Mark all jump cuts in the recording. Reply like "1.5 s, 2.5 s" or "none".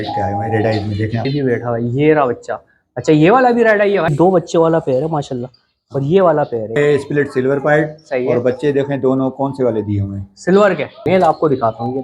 1.3 s, 4.1 s, 6.8 s, 11.0 s